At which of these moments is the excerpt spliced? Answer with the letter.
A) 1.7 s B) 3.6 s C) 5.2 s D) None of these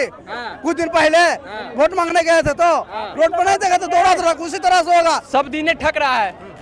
C